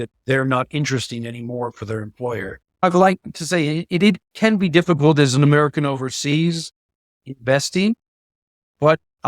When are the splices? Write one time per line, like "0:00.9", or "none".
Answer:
0:02.8